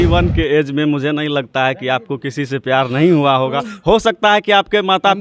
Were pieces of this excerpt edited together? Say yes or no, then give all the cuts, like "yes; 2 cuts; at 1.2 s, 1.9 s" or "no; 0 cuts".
no; 0 cuts